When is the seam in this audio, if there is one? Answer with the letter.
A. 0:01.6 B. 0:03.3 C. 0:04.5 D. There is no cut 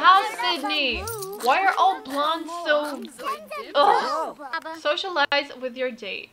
C